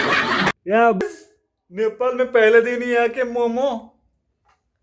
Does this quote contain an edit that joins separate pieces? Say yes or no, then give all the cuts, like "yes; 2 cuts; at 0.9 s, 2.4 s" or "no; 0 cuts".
yes; 1 cut; at 1.0 s